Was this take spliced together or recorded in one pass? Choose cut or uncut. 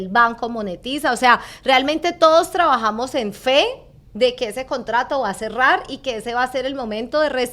uncut